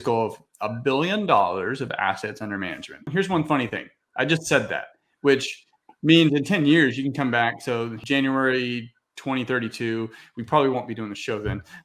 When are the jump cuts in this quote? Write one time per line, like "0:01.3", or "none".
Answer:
0:03.1
0:08.0